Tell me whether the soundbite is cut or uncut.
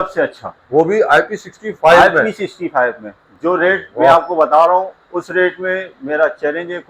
uncut